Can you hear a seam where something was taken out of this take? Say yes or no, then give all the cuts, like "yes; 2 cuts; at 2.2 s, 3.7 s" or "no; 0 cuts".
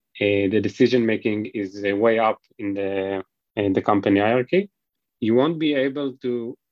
yes; 1 cut; at 5.0 s